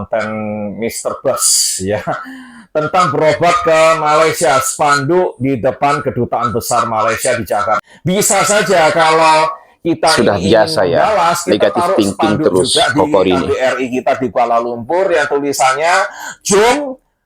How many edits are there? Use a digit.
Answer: 1